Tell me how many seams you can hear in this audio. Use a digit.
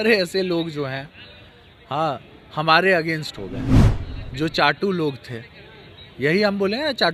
0